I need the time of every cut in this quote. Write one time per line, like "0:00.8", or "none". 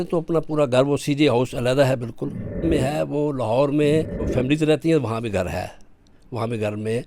0:02.6
0:04.2